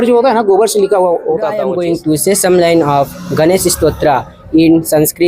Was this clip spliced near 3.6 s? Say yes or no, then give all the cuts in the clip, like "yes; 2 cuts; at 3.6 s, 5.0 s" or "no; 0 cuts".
no; 1 cut; at 1.7 s